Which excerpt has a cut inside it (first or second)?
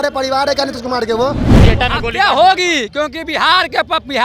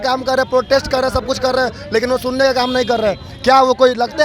first